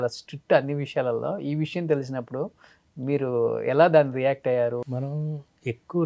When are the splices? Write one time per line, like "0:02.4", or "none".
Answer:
0:04.8